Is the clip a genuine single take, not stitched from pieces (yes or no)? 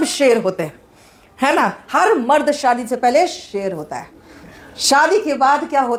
yes